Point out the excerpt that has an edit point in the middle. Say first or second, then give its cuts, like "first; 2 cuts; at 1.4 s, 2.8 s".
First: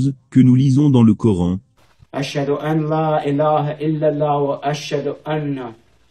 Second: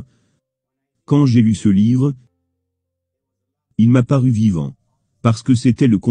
first; 1 cut; at 1.6 s